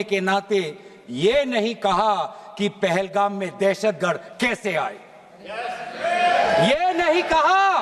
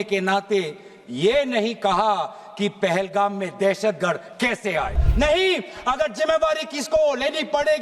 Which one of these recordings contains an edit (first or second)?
second